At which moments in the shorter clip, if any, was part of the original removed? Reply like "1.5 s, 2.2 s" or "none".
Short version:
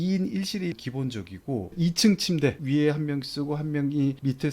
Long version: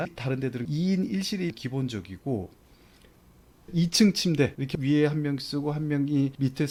1.7 s, 2.6 s